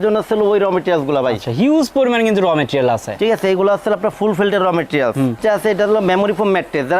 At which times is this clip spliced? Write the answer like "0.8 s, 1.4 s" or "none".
5.4 s